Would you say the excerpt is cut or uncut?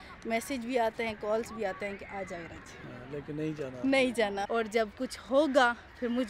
cut